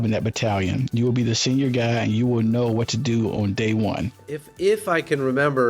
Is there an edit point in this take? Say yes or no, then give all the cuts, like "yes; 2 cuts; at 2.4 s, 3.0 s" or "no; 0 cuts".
yes; 1 cut; at 4.4 s